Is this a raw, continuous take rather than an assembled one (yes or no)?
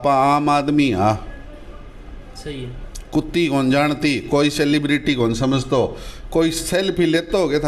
yes